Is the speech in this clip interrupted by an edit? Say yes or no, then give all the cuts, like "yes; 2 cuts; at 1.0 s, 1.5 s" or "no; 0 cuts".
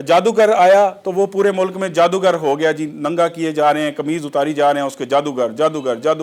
no; 0 cuts